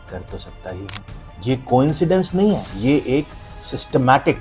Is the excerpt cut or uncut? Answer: cut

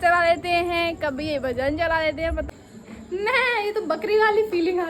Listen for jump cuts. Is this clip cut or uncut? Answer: cut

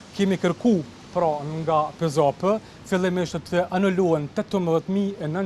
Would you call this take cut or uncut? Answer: uncut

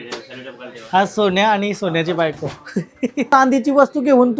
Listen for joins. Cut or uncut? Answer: cut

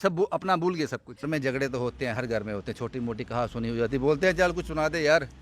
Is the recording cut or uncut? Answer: cut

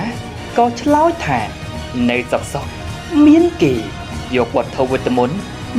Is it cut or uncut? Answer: uncut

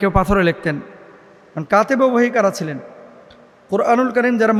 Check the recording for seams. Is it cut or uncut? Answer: uncut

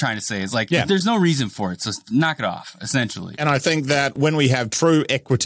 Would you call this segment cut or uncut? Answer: cut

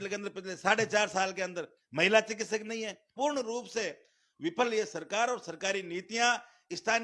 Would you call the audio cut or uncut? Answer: cut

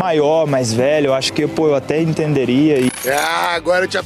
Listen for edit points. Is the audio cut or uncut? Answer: uncut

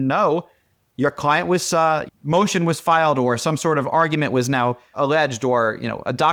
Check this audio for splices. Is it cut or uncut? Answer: uncut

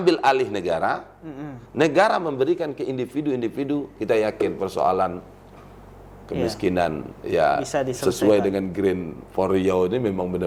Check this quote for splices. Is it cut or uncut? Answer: uncut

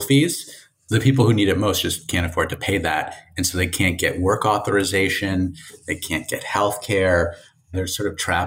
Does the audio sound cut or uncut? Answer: uncut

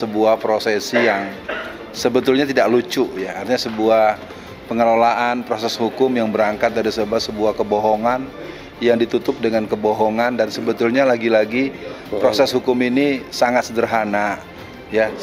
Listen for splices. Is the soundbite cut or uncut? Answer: uncut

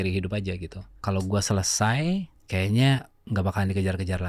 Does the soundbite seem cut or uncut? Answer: cut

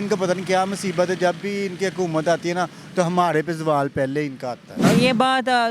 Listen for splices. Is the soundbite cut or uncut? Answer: cut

